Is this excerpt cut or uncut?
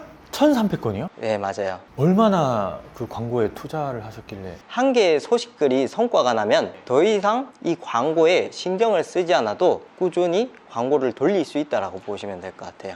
cut